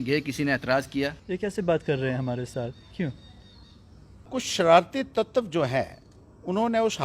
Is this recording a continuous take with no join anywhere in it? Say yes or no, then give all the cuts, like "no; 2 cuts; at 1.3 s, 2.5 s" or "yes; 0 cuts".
no; 2 cuts; at 1.2 s, 4.3 s